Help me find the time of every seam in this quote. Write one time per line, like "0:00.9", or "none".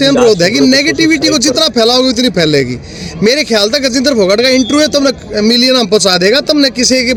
none